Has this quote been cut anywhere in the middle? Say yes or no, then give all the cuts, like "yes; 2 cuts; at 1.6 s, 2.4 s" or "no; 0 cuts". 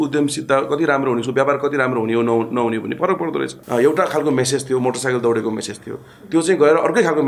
yes; 1 cut; at 3.6 s